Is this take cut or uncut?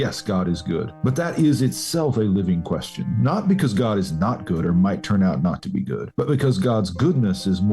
cut